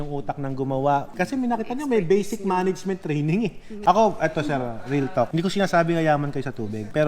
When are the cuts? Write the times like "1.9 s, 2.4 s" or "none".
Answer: 3.7 s